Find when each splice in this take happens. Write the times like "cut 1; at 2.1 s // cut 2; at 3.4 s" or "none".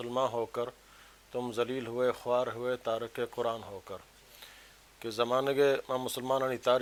none